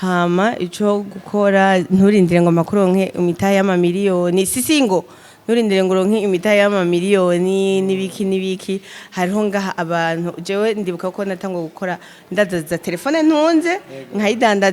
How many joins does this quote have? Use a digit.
0